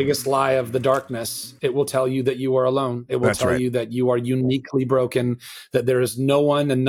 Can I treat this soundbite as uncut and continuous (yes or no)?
yes